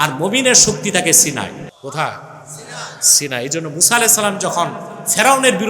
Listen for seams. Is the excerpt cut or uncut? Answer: cut